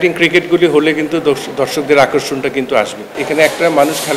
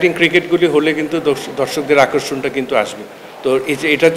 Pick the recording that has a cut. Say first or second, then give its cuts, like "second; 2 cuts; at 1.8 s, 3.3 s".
first; 1 cut; at 3.1 s